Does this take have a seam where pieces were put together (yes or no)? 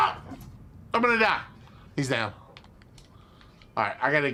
no